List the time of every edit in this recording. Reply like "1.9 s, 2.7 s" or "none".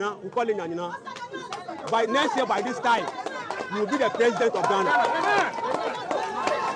2.0 s